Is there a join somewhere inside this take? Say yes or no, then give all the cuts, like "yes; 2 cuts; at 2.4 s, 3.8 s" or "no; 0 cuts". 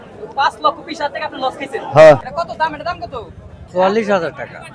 yes; 2 cuts; at 2.4 s, 3.5 s